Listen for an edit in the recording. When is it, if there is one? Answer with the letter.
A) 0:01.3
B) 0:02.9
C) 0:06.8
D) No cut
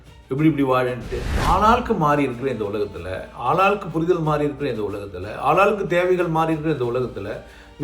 A